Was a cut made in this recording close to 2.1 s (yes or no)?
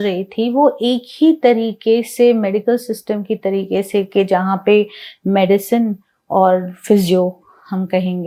no